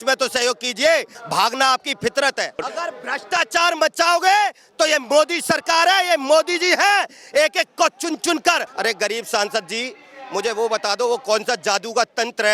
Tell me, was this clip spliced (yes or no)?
yes